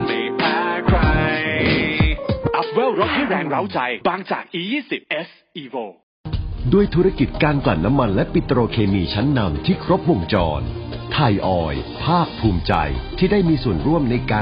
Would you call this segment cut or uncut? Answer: cut